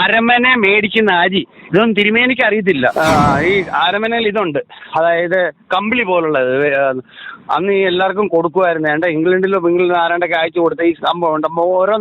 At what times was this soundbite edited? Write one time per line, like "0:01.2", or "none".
0:02.9